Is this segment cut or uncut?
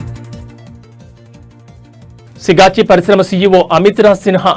uncut